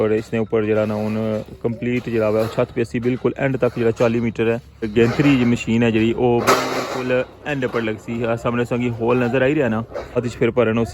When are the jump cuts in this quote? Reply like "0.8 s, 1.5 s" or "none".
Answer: 4.9 s, 10.2 s